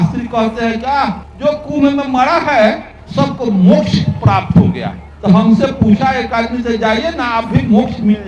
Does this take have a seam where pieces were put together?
no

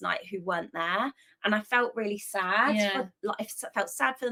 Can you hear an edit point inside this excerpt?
no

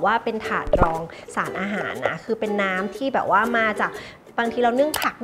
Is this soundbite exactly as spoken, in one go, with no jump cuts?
yes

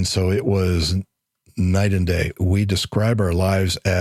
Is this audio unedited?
no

